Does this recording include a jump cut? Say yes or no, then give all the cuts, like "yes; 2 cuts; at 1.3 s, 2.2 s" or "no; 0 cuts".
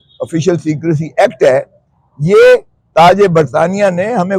no; 0 cuts